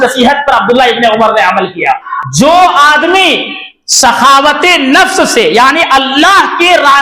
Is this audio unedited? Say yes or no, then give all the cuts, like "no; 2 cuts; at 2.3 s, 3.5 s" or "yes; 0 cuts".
no; 1 cut; at 2.1 s